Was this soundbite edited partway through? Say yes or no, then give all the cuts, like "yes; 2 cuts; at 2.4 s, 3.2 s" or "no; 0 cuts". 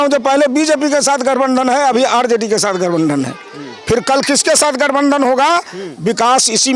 no; 0 cuts